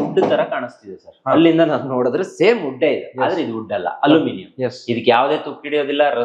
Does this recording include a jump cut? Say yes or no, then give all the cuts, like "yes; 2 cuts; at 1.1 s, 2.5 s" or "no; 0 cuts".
no; 0 cuts